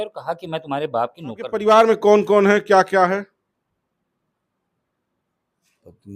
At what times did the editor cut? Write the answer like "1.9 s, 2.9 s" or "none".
1.5 s

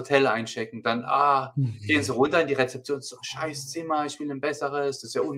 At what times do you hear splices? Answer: none

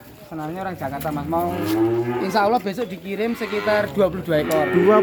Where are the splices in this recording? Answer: none

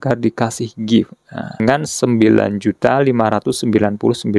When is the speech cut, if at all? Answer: 1.6 s

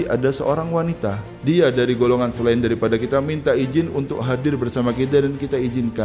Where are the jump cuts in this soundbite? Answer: 1.3 s

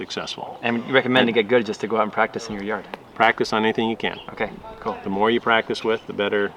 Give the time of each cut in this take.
4.2 s

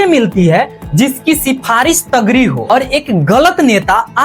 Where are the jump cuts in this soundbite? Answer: 2.6 s

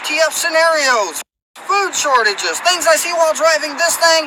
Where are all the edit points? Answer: none

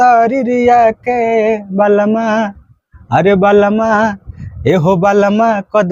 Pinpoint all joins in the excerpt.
none

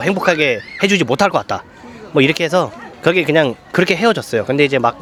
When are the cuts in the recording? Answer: none

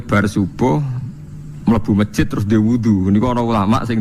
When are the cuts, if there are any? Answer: none

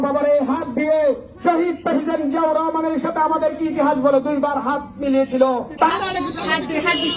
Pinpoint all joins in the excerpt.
5.9 s

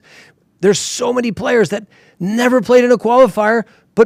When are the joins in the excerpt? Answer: none

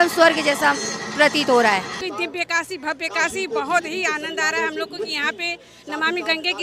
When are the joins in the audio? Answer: 2.0 s

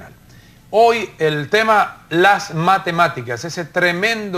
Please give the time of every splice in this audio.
1.1 s

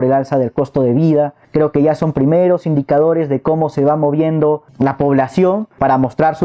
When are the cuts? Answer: none

